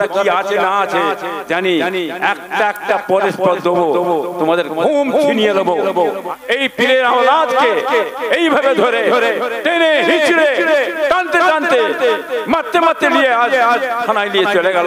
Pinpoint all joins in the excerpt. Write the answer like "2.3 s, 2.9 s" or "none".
6.3 s